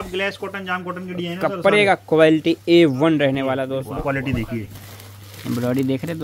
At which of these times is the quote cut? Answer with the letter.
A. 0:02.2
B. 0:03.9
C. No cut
B